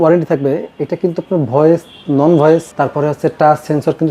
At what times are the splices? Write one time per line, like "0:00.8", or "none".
0:02.7